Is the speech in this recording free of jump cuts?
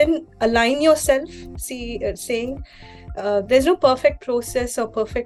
yes; 0 cuts

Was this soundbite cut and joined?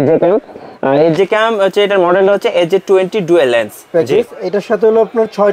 yes; 1 cut; at 3.8 s

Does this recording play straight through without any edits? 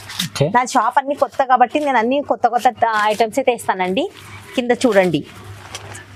yes; 0 cuts

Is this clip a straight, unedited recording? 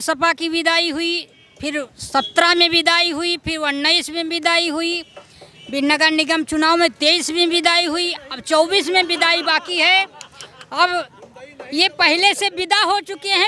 yes; 0 cuts

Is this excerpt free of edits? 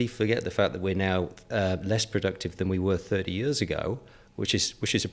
yes; 0 cuts

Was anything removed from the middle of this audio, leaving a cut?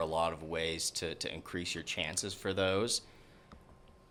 no; 0 cuts

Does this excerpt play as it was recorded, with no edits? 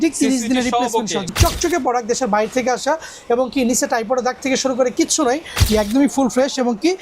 no; 2 cuts; at 1.3 s, 5.7 s

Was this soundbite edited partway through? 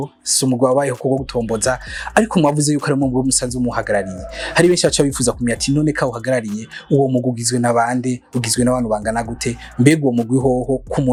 no; 0 cuts

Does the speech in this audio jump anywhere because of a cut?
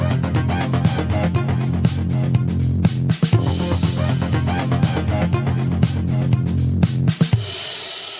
no; 0 cuts

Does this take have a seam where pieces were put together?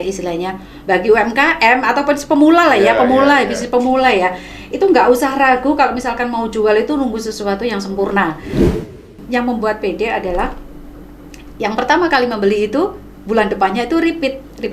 yes; 1 cut; at 8.7 s

